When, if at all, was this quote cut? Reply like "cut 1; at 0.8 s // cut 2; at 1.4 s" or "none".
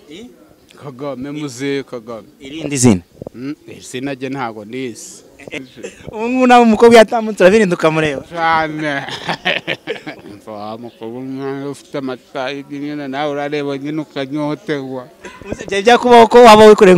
cut 1; at 5.5 s // cut 2; at 10.3 s